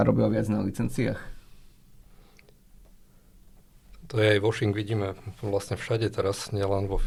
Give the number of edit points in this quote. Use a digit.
0